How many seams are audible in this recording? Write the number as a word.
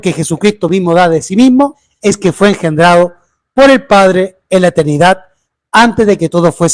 zero